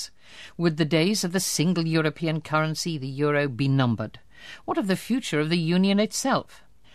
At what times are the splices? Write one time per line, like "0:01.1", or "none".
0:03.6